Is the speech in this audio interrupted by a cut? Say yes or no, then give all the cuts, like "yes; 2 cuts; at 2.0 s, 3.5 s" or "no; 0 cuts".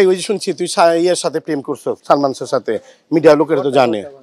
yes; 1 cut; at 2.0 s